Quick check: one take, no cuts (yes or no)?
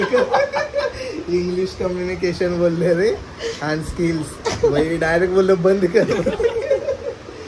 no